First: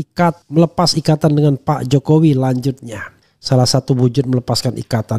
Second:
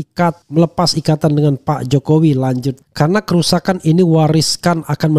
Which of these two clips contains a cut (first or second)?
second